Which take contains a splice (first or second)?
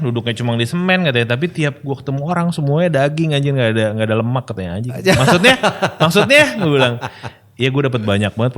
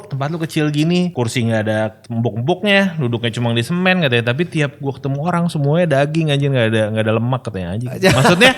second